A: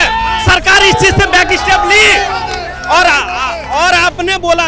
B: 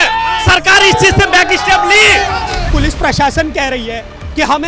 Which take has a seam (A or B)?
B